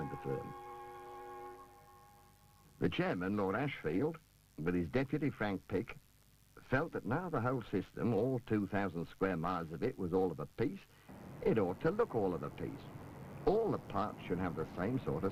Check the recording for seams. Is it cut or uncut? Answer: uncut